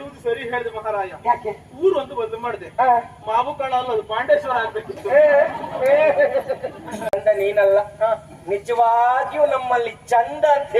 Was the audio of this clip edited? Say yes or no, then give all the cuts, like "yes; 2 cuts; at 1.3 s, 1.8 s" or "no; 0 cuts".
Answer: yes; 1 cut; at 7.2 s